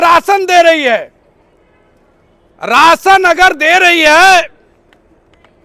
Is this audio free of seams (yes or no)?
yes